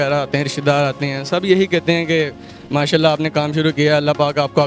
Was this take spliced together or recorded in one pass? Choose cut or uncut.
uncut